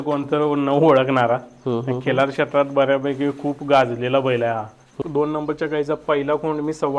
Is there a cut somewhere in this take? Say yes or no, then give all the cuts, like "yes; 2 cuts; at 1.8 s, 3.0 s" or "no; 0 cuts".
yes; 1 cut; at 5.0 s